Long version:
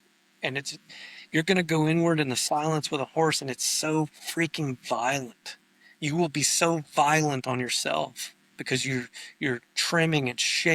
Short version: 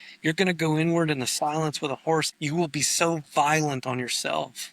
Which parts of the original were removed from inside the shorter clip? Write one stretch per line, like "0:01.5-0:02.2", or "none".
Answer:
0:03.4-0:05.9